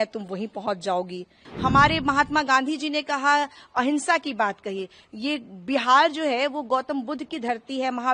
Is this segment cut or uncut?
cut